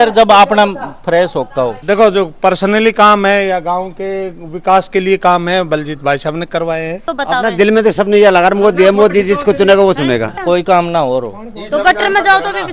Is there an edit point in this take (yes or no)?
yes